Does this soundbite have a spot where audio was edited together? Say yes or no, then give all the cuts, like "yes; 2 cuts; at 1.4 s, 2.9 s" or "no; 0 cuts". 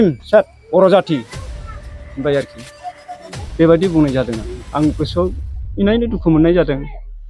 no; 0 cuts